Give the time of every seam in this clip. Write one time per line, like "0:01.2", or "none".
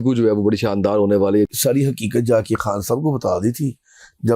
0:01.5